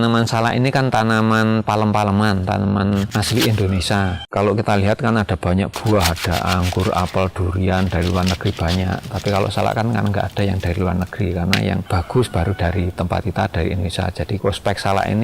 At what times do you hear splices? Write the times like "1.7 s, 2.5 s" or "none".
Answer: 3.1 s, 11.9 s, 14.4 s